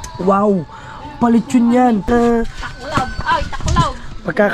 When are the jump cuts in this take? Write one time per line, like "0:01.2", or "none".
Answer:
0:02.1